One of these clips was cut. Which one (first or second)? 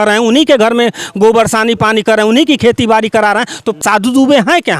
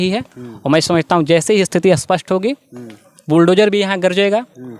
first